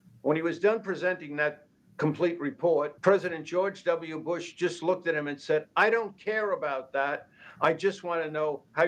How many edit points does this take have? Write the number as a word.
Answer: one